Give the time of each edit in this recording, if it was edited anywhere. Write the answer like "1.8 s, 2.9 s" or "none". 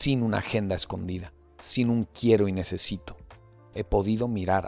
none